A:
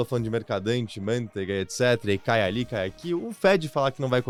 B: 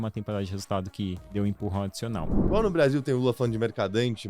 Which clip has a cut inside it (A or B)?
B